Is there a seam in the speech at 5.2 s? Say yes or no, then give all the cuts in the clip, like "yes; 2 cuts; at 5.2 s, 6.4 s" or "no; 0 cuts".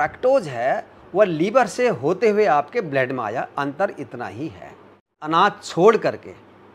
yes; 1 cut; at 5.2 s